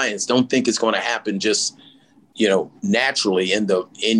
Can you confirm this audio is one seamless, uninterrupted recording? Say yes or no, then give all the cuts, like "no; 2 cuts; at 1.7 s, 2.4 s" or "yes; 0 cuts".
yes; 0 cuts